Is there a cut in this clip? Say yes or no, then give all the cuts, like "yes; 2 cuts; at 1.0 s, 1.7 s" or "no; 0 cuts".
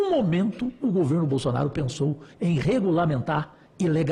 no; 0 cuts